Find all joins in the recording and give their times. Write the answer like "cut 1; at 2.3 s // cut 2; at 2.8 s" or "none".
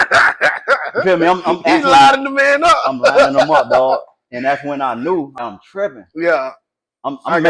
cut 1; at 5.4 s